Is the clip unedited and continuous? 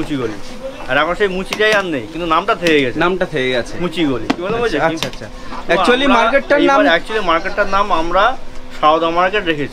yes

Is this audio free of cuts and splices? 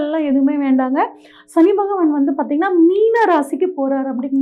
yes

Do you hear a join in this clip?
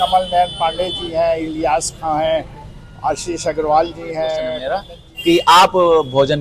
yes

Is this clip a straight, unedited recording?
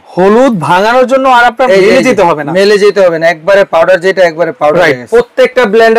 no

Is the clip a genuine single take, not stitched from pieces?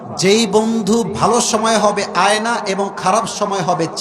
no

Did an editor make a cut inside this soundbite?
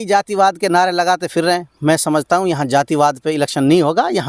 no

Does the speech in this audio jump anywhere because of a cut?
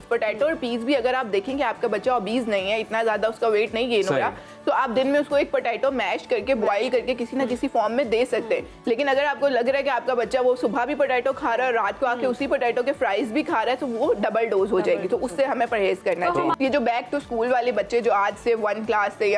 yes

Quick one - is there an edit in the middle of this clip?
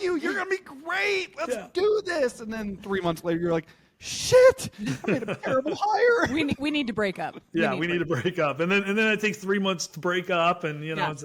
no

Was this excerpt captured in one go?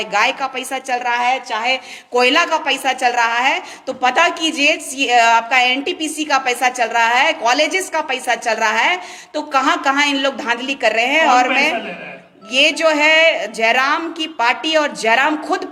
yes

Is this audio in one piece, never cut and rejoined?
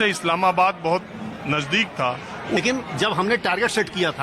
no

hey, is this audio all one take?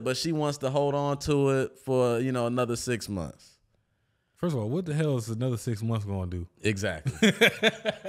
yes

